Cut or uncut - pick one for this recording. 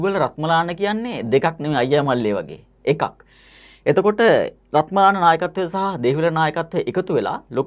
uncut